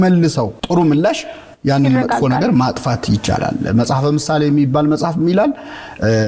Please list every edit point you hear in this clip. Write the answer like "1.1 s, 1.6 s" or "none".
none